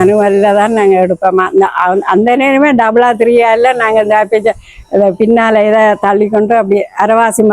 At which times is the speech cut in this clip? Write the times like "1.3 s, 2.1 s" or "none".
none